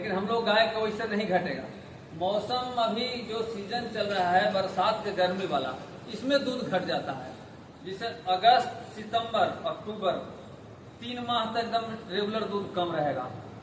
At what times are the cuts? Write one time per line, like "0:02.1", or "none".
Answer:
none